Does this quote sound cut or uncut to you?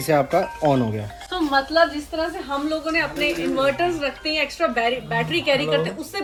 uncut